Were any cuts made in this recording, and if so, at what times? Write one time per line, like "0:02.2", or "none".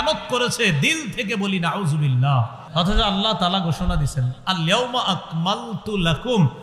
0:02.6